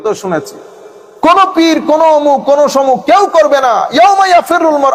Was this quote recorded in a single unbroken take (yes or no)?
yes